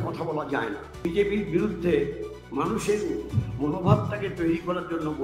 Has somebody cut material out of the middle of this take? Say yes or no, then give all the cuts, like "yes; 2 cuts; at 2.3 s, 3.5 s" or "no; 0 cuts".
yes; 1 cut; at 1.0 s